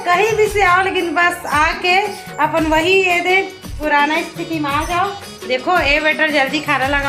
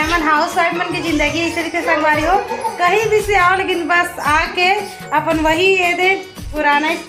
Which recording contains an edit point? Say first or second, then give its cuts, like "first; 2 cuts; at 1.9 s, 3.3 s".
first; 1 cut; at 5.3 s